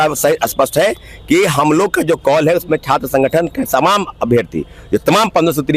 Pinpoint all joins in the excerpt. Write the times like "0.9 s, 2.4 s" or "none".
none